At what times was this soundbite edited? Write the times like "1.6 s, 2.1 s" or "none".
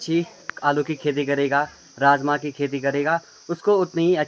none